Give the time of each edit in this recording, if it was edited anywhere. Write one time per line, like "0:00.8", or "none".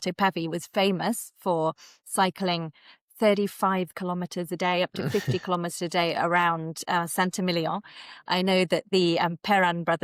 none

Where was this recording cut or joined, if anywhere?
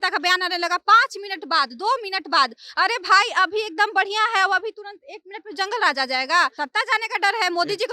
0:06.6

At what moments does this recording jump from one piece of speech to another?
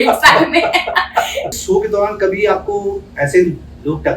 0:01.6

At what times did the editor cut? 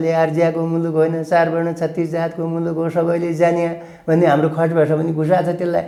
none

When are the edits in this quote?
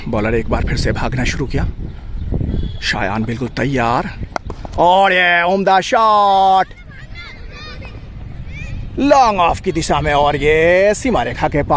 none

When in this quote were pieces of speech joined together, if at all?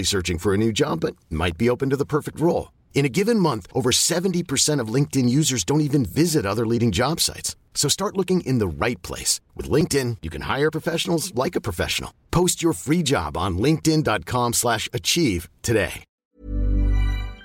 0:16.1

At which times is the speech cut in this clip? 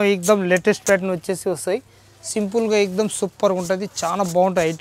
none

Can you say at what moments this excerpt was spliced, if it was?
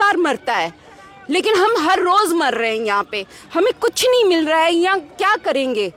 none

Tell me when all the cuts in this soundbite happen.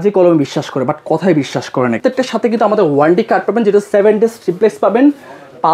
0:02.0

